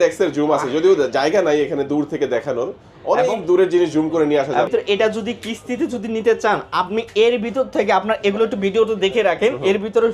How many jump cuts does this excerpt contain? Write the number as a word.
one